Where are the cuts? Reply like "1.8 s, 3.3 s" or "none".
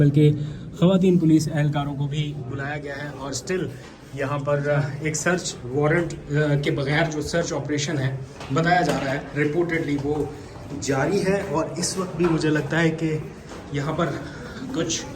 none